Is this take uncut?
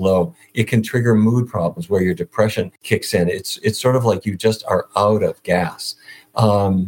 no; 1 cut; at 2.8 s

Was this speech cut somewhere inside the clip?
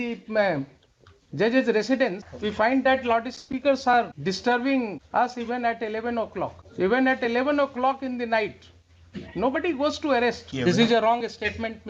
yes; 5 cuts; at 2.3 s, 4.1 s, 5.0 s, 6.6 s, 10.5 s

